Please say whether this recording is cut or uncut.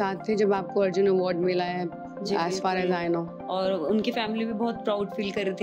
uncut